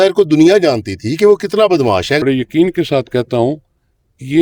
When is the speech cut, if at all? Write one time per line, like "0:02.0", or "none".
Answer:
0:02.2